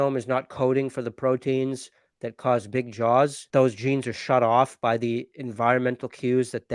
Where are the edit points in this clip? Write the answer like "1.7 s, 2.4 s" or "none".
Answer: 3.4 s